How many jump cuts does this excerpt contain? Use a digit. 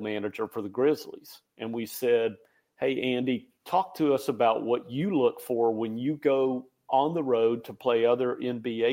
0